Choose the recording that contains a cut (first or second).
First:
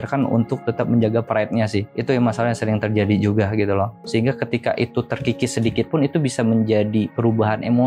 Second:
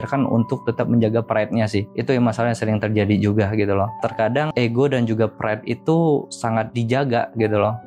first